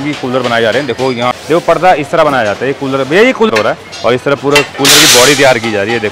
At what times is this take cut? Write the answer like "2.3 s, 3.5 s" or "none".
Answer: 1.3 s, 3.5 s